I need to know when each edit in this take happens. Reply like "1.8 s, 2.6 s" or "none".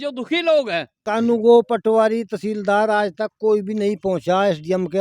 0.9 s